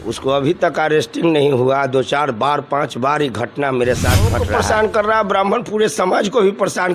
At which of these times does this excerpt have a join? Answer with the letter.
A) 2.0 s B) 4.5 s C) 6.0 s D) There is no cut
B